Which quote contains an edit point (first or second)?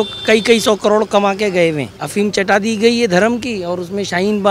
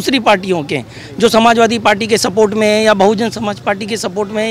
first